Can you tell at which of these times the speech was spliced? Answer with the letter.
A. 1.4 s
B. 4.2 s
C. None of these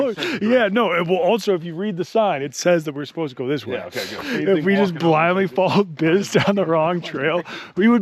B